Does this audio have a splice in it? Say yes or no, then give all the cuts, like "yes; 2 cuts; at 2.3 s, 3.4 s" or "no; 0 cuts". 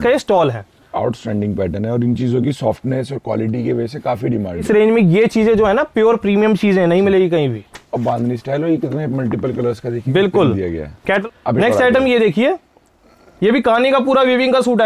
yes; 2 cuts; at 4.6 s, 11.3 s